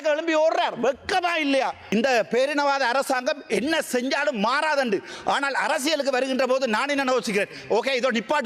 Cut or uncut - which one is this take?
cut